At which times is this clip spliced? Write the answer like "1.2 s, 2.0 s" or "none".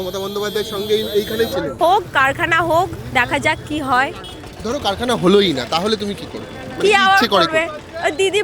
1.7 s